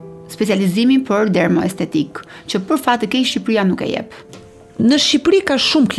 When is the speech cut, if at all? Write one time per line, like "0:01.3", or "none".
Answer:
none